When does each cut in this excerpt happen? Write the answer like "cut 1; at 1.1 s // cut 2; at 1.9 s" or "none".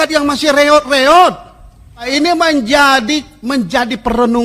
cut 1; at 2.1 s